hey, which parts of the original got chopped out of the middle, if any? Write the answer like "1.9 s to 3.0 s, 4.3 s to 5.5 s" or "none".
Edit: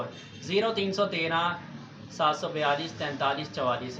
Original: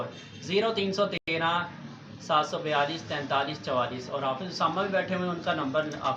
1.2 s to 1.3 s